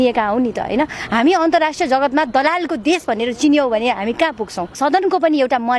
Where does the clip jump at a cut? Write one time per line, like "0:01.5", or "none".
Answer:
0:04.6